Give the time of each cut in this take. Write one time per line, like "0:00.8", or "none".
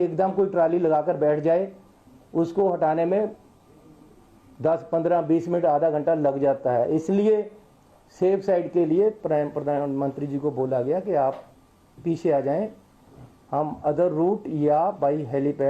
none